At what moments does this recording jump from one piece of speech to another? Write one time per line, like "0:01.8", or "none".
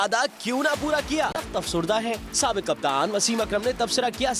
0:01.5